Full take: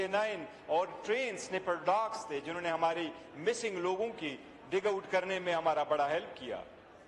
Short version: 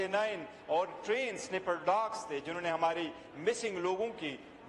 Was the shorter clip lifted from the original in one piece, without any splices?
yes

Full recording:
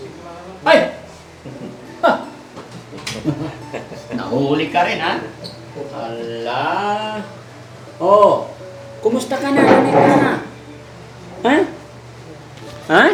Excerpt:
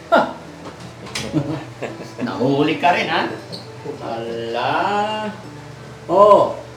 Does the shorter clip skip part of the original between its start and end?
no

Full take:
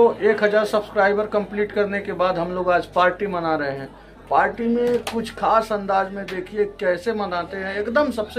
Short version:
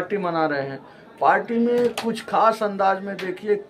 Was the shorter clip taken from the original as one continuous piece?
yes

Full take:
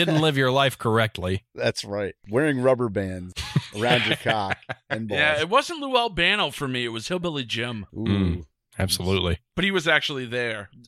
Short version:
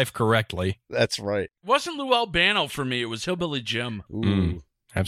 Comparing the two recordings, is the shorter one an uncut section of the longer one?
no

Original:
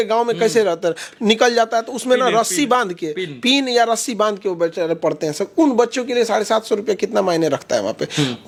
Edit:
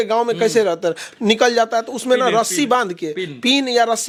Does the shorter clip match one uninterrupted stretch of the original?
yes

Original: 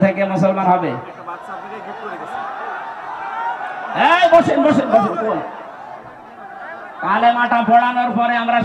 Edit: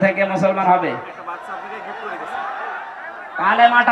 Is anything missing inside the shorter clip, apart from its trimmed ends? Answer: yes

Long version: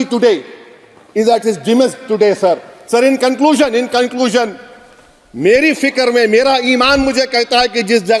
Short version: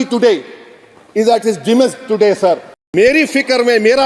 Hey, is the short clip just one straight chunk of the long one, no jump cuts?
no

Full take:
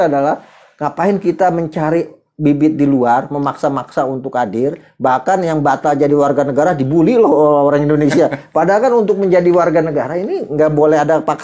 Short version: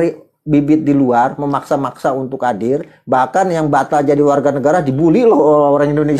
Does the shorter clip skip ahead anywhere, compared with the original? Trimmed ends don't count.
no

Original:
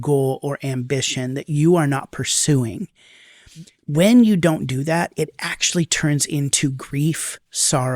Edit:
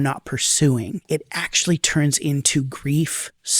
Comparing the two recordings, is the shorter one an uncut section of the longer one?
no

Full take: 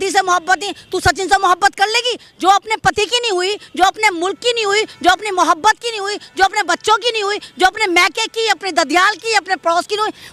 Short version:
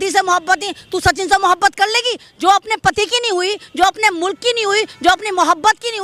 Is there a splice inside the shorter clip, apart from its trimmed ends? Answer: no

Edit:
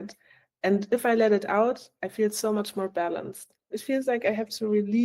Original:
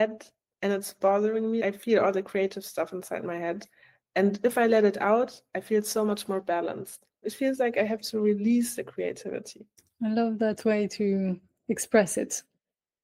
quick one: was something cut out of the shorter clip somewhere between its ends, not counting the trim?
no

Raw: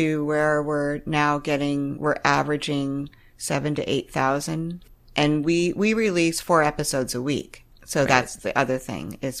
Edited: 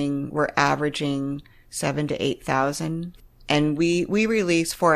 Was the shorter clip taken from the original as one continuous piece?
yes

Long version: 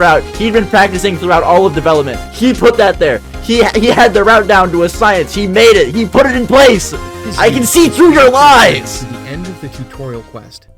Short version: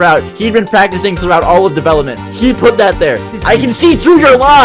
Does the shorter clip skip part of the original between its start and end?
yes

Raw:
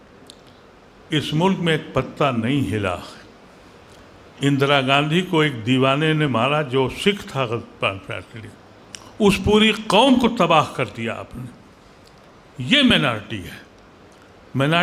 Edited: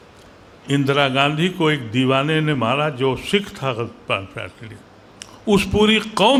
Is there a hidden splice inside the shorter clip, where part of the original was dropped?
no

